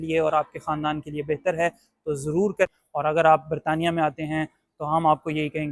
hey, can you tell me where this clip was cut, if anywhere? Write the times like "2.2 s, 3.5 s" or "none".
2.7 s